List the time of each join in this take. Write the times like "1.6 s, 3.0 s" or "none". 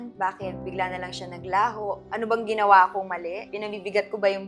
none